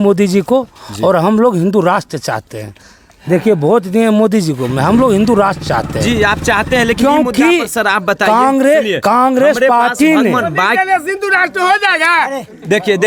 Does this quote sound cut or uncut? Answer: uncut